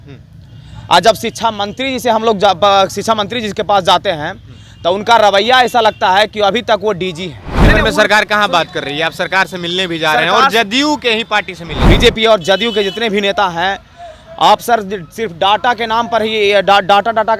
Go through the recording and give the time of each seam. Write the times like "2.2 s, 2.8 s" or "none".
7.5 s, 11.7 s